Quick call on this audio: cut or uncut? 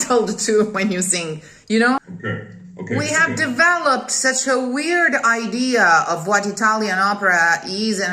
cut